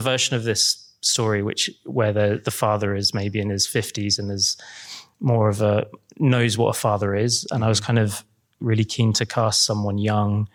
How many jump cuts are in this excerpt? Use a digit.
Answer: 0